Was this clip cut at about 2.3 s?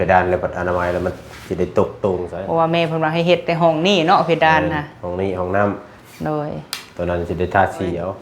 yes; 1 cut; at 2.3 s

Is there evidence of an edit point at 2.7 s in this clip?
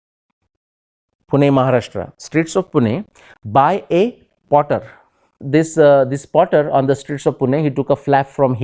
no; 1 cut; at 5.3 s

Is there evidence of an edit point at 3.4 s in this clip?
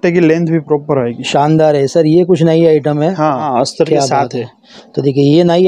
yes; 1 cut; at 3.4 s

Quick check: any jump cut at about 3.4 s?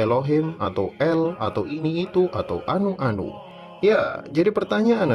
yes; 1 cut; at 3.4 s

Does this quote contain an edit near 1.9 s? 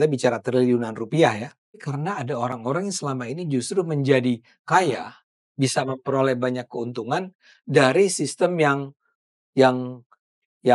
yes; 1 cut; at 1.9 s

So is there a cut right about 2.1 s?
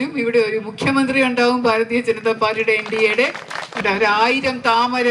no; 1 cut; at 3.8 s

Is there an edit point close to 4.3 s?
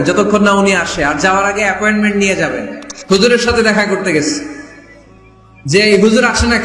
no; 1 cut; at 2.9 s

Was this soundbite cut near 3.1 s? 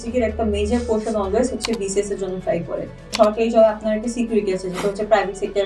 yes; 1 cut; at 3.1 s

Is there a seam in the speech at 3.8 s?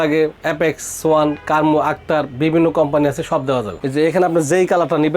yes; 1 cut; at 3.8 s

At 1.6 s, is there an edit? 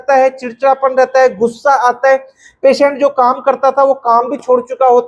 no; 0 cuts

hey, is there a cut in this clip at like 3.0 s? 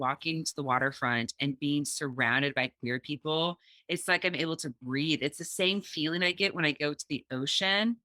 no; 0 cuts

